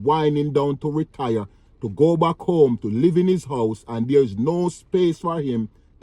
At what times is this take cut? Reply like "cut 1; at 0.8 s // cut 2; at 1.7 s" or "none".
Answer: none